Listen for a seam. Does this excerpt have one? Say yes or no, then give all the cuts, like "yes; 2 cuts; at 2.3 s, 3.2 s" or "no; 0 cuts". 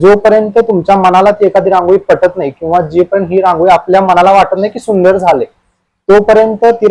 no; 0 cuts